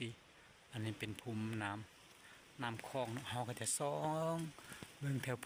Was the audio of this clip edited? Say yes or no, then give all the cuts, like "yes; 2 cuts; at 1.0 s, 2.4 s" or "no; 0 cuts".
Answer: no; 0 cuts